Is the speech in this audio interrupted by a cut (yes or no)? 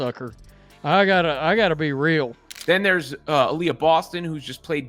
yes